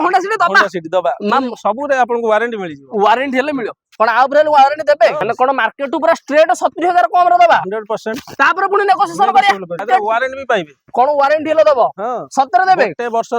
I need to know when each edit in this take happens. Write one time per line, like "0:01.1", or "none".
0:05.2
0:09.8

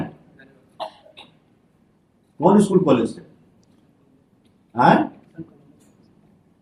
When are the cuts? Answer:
none

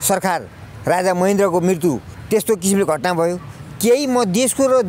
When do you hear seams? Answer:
0:02.1

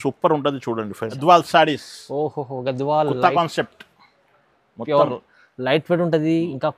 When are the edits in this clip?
0:01.2

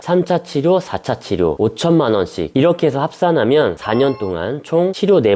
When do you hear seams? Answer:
none

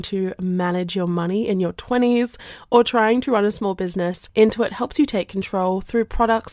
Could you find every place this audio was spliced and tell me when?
0:04.2

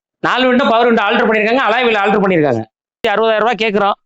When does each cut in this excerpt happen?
0:03.1

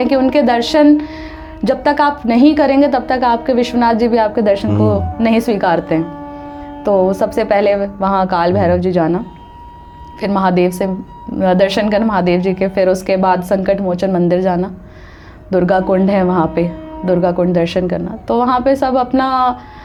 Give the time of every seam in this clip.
none

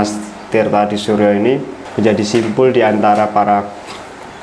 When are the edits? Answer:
0:01.8

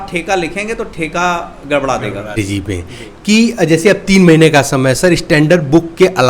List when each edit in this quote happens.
0:02.4

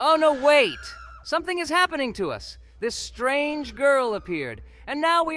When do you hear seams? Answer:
none

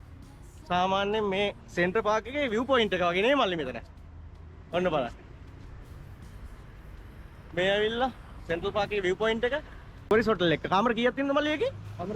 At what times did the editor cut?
0:10.1

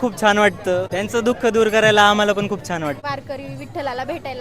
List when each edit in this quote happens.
0:00.9
0:03.0

